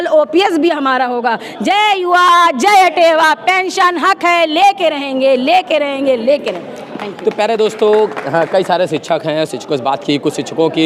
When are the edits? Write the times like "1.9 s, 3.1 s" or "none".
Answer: none

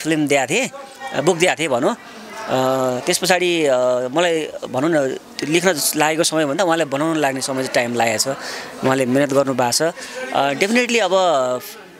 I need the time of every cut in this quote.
none

